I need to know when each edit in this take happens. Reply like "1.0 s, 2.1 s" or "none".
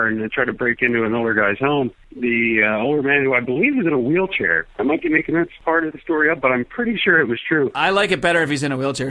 2.0 s, 5.5 s